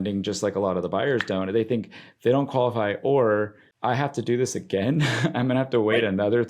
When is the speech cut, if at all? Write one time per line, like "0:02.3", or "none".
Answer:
0:03.6